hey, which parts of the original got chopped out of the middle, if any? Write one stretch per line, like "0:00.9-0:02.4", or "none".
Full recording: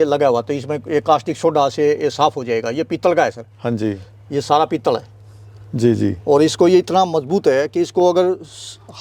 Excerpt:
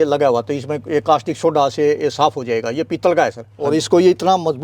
0:03.7-0:06.3